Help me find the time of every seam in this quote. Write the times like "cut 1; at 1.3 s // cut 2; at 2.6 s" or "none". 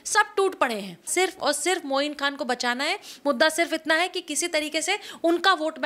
cut 1; at 1.1 s